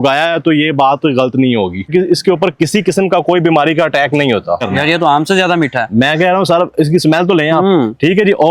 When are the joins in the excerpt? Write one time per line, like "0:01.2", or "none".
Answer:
0:01.9
0:04.6